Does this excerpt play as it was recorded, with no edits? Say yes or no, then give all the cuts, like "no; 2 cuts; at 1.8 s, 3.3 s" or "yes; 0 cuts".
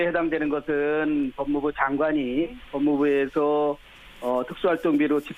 no; 1 cut; at 3.8 s